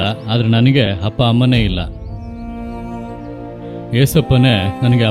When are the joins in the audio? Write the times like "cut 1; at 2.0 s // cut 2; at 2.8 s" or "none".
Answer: cut 1; at 1.9 s // cut 2; at 3.8 s